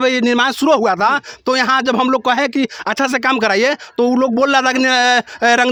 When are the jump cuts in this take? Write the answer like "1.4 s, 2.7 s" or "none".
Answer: none